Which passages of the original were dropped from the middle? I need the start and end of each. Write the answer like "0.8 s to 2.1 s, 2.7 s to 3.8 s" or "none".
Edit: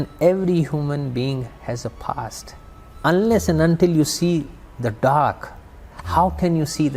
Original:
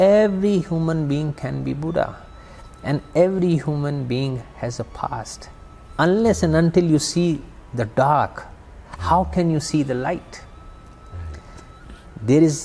none